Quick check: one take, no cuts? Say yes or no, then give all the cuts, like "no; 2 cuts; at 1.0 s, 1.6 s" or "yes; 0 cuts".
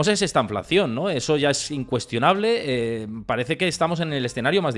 yes; 0 cuts